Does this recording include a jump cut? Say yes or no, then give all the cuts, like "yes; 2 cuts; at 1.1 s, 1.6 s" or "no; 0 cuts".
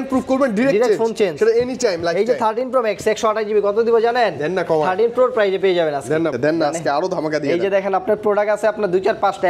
yes; 1 cut; at 6.3 s